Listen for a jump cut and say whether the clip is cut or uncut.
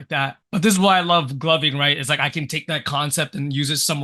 uncut